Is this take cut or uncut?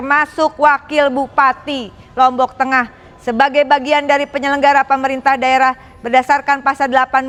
uncut